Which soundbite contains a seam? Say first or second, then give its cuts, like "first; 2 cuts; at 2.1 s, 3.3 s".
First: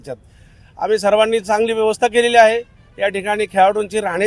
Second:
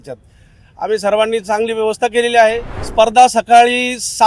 second; 1 cut; at 2.7 s